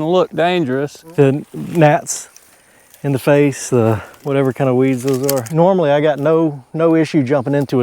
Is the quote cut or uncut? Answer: cut